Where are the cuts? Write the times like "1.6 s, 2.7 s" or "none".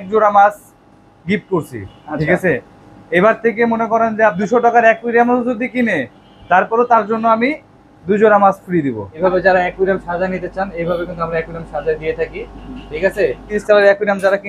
4.4 s, 9.1 s, 13.5 s